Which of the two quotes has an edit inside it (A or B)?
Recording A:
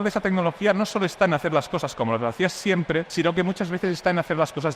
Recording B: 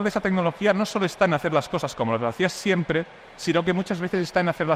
A